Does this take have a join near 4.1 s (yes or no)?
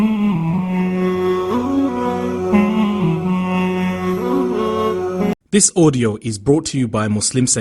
no